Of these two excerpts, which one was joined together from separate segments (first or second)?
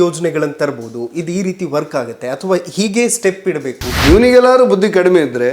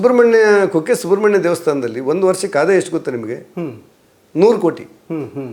first